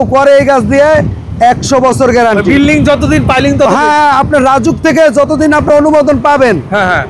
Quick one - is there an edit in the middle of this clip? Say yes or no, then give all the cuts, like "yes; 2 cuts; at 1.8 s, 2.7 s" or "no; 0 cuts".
no; 0 cuts